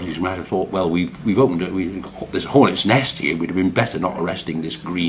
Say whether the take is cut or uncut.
cut